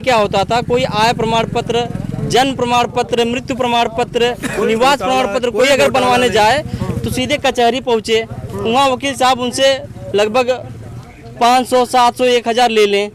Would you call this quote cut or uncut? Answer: uncut